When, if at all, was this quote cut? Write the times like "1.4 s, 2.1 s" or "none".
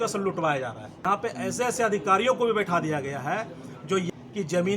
1.0 s, 4.1 s